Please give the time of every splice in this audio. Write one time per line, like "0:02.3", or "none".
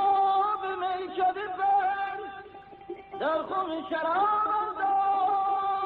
none